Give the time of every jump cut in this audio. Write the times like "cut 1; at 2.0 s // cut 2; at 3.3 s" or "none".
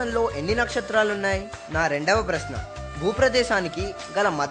cut 1; at 1.6 s